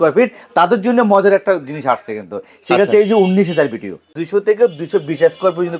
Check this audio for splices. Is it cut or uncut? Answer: cut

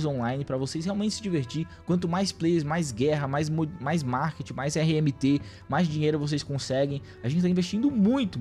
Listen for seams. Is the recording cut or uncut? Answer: uncut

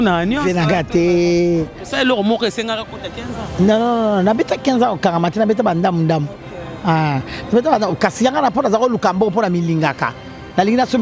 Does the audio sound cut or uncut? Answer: uncut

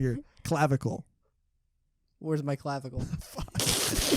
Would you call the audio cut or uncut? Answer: uncut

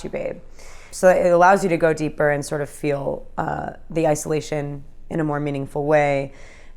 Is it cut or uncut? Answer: cut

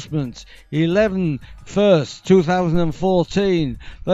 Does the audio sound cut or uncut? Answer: uncut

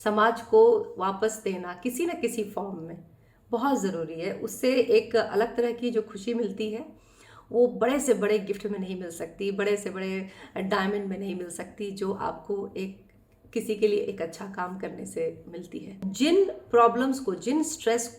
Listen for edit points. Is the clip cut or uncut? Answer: cut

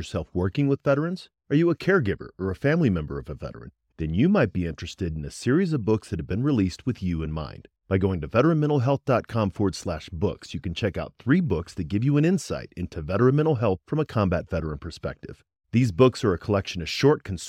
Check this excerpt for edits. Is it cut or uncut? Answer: uncut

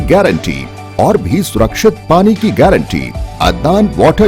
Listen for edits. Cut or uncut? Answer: cut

